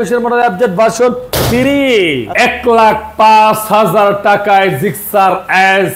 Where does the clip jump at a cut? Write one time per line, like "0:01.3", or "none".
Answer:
0:02.3